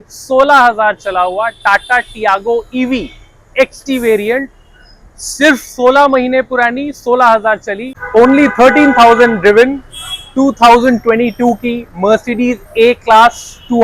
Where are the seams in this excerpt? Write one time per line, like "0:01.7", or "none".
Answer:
0:07.8